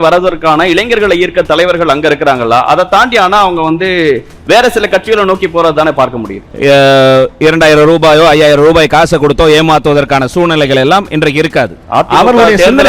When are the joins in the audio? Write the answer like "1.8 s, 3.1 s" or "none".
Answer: 6.5 s

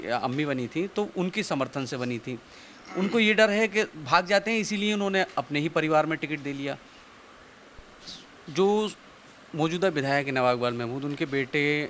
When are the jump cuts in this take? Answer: 7.8 s

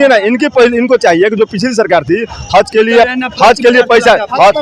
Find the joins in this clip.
none

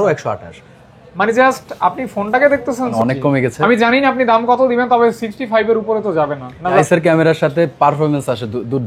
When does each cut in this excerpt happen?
2.9 s, 6.8 s

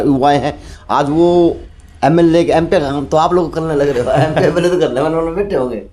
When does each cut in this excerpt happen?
none

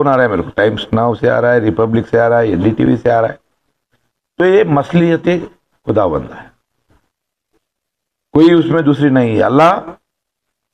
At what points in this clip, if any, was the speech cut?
none

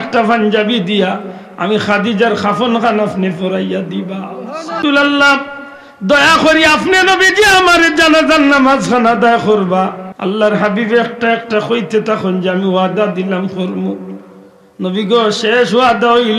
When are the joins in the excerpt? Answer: 4.8 s, 10.1 s

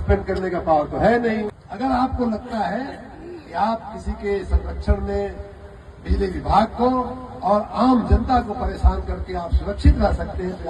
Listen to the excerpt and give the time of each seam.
1.6 s

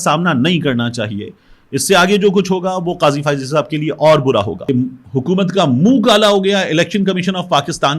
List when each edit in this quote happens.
4.7 s

